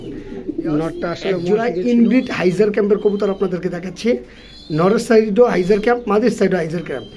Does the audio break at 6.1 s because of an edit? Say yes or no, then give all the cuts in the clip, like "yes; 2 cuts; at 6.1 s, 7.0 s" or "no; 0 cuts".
no; 1 cut; at 1.4 s